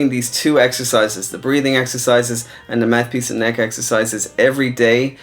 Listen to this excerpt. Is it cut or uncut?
uncut